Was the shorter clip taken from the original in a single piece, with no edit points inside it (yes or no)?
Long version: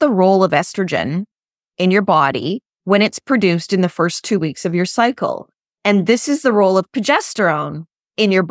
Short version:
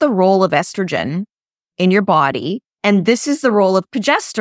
no